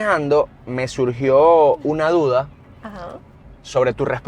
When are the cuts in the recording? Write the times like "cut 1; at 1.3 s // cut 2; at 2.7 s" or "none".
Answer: none